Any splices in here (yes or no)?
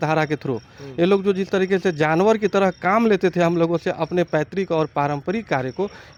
no